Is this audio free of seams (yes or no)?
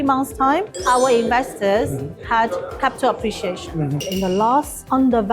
no